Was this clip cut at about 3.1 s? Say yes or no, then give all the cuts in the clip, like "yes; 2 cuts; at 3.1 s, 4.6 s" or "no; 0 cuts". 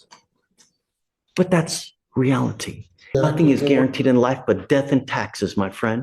yes; 1 cut; at 3.1 s